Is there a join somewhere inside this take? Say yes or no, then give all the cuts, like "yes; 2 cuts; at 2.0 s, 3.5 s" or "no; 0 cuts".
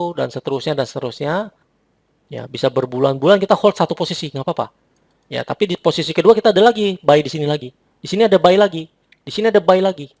yes; 1 cut; at 1.7 s